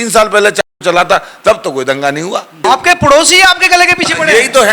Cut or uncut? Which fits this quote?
cut